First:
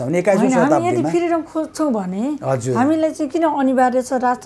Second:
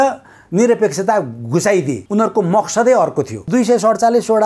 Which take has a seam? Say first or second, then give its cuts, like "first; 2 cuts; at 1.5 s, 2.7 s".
second; 2 cuts; at 2.0 s, 3.4 s